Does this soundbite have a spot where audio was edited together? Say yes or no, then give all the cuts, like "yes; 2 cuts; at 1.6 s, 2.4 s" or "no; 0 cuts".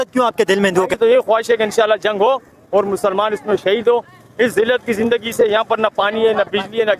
yes; 1 cut; at 1.0 s